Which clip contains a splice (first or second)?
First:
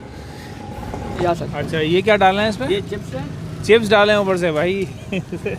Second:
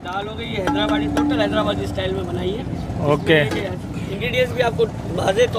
first